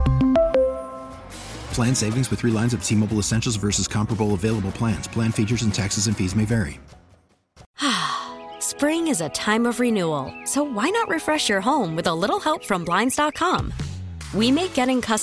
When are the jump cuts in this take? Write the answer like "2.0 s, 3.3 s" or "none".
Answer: 7.6 s